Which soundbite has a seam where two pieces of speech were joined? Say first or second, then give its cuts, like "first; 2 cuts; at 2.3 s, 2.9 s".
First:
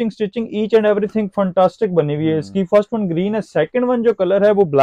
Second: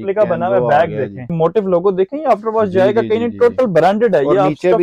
second; 1 cut; at 1.3 s